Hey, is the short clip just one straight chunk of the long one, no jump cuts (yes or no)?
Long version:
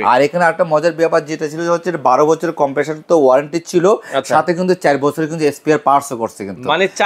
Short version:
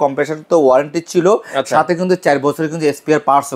yes